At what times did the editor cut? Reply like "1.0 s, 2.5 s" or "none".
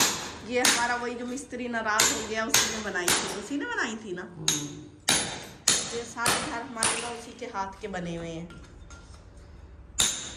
none